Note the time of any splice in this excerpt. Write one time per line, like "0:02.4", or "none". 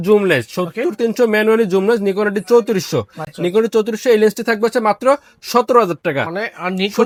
none